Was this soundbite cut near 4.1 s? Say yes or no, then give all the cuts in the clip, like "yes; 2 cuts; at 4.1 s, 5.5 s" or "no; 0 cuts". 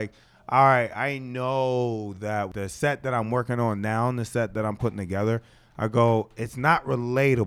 no; 1 cut; at 2.5 s